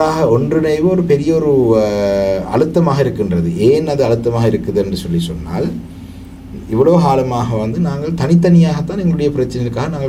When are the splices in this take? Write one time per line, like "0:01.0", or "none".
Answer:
none